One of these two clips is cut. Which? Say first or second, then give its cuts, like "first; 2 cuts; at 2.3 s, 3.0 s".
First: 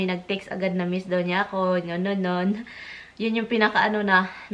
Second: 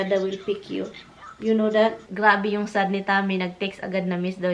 second; 1 cut; at 2.1 s